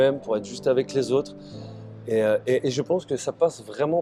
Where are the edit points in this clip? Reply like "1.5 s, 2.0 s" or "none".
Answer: none

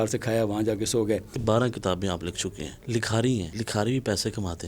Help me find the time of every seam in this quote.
1.3 s, 2.7 s, 3.6 s

